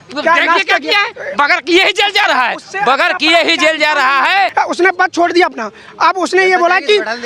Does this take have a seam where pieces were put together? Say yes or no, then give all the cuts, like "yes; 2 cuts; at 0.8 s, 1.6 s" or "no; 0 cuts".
yes; 1 cut; at 4.5 s